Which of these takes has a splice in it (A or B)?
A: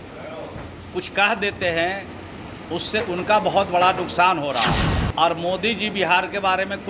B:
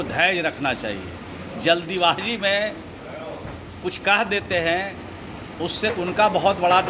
A